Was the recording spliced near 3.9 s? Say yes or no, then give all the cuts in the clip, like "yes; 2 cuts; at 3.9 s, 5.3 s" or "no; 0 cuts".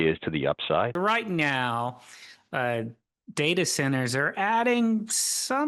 no; 1 cut; at 1.0 s